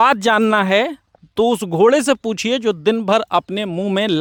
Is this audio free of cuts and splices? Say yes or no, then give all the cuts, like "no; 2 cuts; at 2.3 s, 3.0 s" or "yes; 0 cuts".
yes; 0 cuts